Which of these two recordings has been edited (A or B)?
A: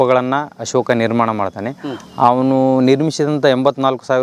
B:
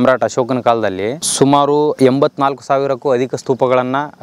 B